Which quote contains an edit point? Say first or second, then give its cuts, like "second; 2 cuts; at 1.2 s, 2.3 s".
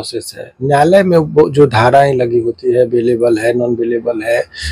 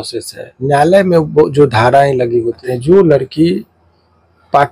second; 1 cut; at 2.6 s